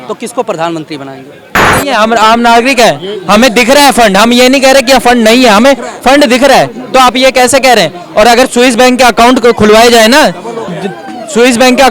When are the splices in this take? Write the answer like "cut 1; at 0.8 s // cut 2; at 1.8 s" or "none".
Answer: cut 1; at 1.7 s